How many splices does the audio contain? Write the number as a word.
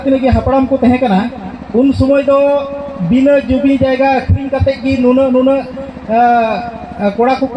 zero